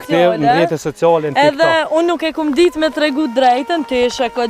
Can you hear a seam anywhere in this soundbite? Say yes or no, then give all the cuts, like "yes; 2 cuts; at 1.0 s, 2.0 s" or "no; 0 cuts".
no; 0 cuts